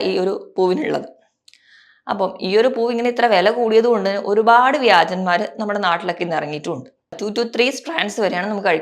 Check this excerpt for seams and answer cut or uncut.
cut